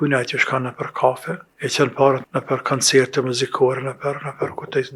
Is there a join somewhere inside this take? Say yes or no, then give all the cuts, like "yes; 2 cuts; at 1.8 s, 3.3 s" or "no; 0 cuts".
yes; 2 cuts; at 1.4 s, 2.2 s